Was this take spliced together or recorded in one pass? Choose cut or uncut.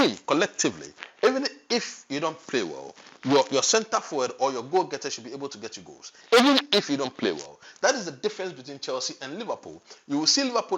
uncut